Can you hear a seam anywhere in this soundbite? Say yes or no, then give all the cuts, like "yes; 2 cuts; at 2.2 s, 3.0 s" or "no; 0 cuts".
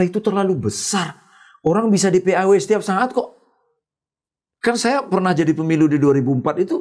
no; 0 cuts